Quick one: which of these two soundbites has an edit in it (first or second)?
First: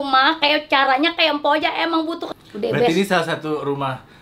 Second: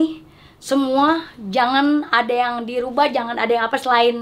first